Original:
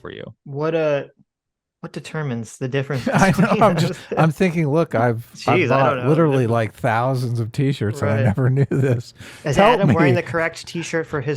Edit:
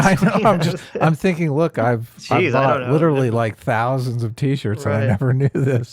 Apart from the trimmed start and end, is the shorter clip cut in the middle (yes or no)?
no